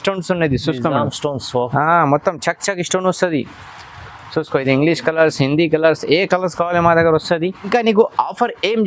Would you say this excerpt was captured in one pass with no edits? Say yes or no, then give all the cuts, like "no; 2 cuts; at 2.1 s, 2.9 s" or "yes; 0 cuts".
no; 1 cut; at 7.7 s